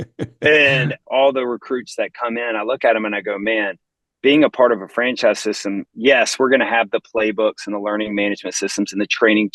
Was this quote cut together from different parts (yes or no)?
yes